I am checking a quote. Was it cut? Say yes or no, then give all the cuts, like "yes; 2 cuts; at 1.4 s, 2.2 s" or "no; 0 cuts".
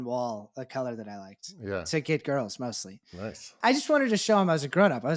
yes; 1 cut; at 3.4 s